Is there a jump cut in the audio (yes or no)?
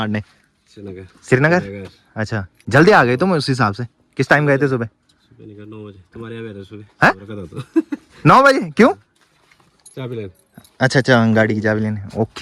no